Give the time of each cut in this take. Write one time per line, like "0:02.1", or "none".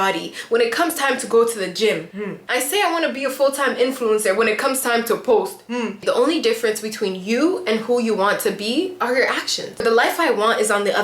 0:02.4
0:05.9
0:09.8